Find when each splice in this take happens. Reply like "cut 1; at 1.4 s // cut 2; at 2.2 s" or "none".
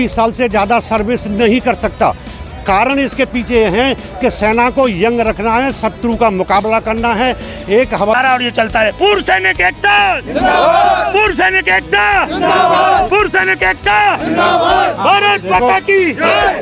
cut 1; at 8.1 s